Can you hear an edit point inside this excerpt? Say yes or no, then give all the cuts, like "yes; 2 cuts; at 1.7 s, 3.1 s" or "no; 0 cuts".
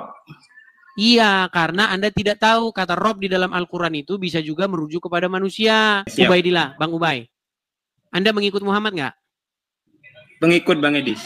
yes; 1 cut; at 6.1 s